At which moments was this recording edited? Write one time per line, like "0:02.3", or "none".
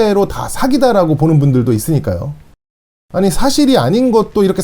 0:02.5